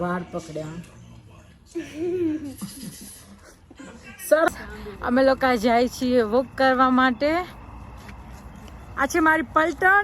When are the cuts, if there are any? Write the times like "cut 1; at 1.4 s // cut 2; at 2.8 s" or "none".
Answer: cut 1; at 4.5 s